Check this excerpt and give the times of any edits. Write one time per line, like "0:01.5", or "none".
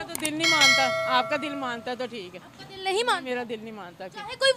none